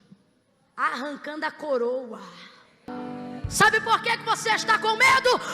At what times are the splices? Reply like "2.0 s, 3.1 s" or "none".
2.9 s